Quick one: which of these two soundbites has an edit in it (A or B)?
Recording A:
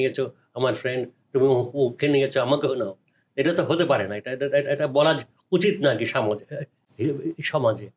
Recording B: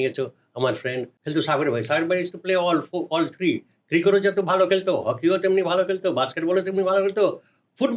B